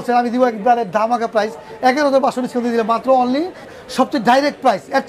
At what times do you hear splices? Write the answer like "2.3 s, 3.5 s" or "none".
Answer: 3.7 s